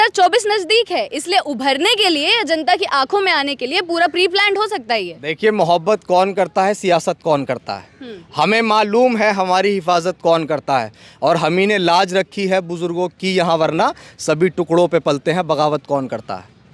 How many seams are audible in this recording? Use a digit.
0